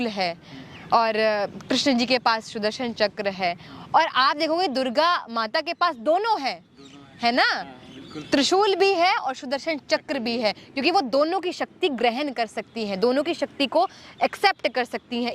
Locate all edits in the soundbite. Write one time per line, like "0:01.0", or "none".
none